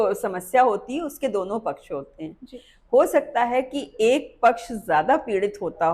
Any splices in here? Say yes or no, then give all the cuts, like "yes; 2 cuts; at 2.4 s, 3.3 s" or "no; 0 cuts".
no; 0 cuts